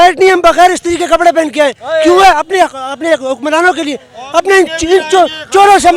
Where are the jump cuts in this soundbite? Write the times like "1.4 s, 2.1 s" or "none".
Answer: none